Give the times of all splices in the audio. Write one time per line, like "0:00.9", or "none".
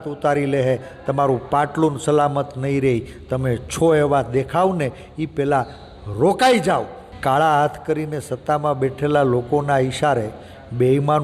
0:07.0